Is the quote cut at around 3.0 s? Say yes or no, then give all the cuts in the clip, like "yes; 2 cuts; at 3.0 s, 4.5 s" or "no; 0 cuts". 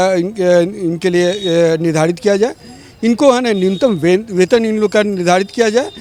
no; 0 cuts